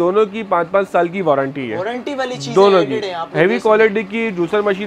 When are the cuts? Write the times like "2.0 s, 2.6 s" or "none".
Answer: none